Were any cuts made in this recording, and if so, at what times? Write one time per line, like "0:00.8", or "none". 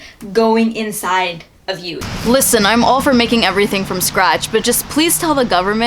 0:02.0

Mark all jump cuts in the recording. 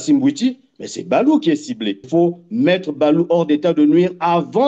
0:02.1

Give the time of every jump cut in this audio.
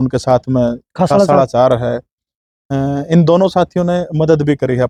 none

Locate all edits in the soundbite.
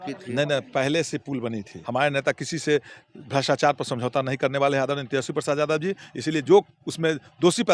0:01.8

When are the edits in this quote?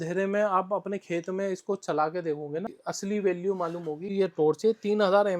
0:02.8
0:04.1

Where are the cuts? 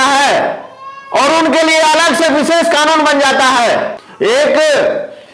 0:04.0

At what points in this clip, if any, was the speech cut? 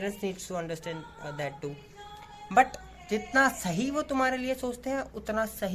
none

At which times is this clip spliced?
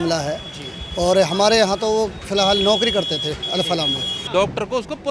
0:04.1

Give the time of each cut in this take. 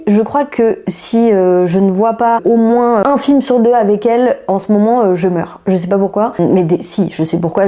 none

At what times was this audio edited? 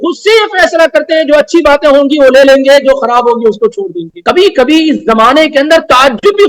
0:04.1

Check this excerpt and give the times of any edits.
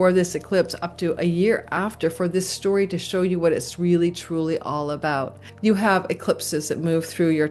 0:05.4

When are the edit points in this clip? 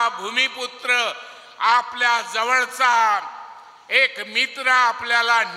none

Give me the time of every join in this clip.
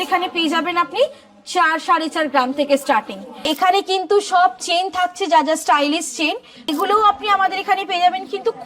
0:03.5
0:06.6

